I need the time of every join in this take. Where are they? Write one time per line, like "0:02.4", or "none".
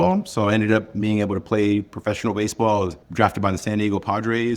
0:03.0